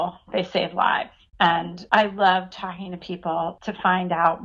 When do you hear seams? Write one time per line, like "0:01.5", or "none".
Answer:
0:01.8
0:03.6